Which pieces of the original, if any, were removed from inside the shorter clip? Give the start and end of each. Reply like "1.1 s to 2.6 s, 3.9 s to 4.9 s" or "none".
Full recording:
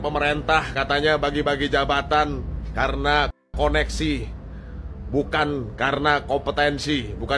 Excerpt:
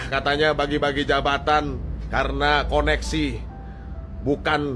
3.3 s to 3.5 s